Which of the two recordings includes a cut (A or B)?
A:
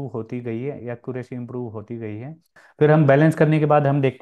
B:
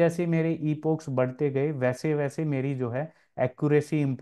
A